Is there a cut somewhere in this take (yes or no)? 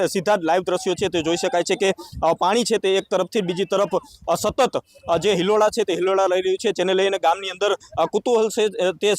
no